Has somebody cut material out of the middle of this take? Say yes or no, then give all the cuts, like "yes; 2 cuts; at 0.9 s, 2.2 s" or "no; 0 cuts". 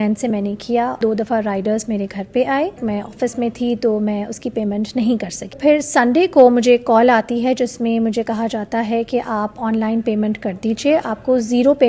yes; 3 cuts; at 1.0 s, 2.8 s, 5.5 s